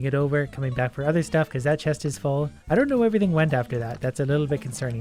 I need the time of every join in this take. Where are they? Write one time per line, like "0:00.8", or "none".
0:02.6